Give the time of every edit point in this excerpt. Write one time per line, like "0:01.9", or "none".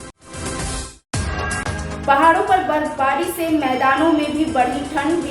0:00.9